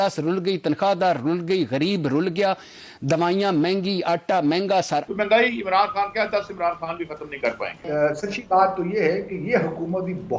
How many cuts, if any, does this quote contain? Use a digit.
2